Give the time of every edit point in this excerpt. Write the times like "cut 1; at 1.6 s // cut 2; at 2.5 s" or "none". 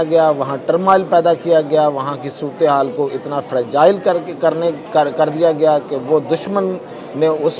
none